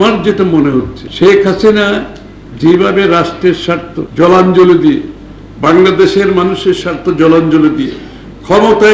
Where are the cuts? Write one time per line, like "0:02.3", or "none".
0:01.0
0:04.0